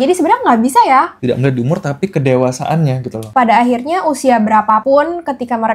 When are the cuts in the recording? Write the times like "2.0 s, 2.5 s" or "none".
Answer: 1.1 s, 3.2 s, 4.8 s